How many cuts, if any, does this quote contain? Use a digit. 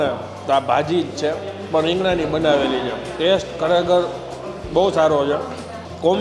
0